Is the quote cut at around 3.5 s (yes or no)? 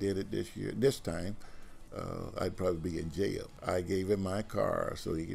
yes